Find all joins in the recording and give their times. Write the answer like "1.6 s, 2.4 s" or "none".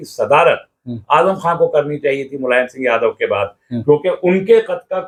none